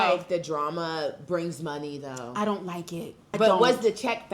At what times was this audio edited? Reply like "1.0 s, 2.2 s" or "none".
3.3 s